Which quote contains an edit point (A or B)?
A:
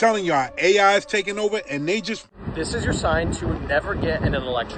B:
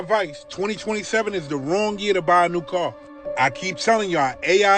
A